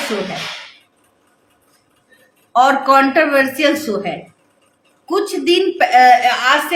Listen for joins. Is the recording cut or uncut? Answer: uncut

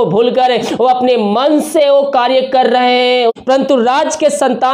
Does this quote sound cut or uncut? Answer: cut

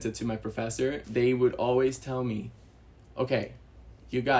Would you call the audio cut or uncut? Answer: cut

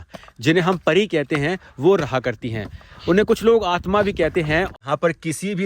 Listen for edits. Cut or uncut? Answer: cut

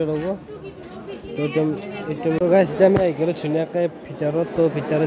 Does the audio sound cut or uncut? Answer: cut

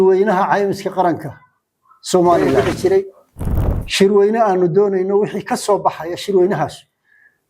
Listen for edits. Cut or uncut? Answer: cut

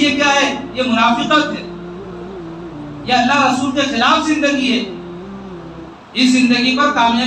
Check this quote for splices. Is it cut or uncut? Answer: cut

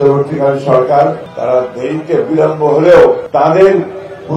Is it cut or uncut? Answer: cut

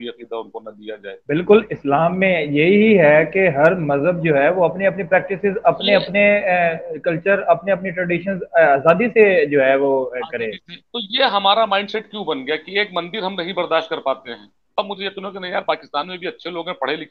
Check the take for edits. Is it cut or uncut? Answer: cut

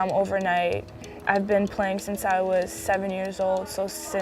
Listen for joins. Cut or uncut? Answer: cut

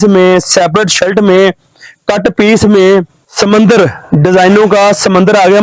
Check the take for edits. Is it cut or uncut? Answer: cut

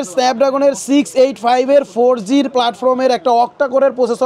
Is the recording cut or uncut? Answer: uncut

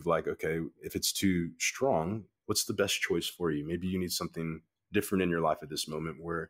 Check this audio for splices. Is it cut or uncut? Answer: uncut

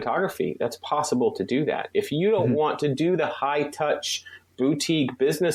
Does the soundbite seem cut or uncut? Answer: uncut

